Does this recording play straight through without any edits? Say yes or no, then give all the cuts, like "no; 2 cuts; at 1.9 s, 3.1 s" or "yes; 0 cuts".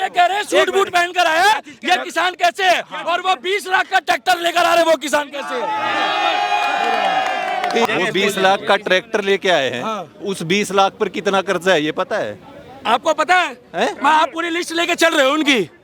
yes; 0 cuts